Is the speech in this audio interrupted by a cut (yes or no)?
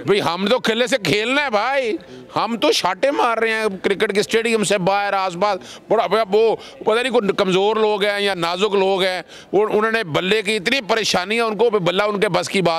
no